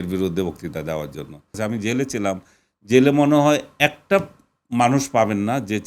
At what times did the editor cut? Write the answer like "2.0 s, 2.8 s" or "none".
1.5 s